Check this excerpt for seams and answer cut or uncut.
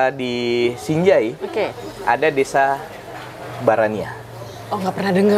uncut